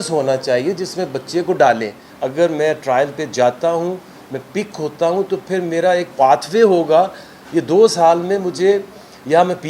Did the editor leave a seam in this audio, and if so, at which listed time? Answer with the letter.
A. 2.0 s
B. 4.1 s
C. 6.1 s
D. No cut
A